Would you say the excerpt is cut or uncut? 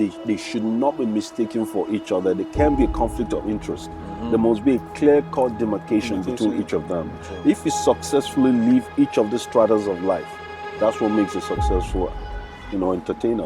uncut